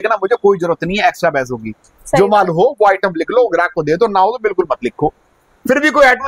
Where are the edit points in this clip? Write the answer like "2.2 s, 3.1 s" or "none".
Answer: none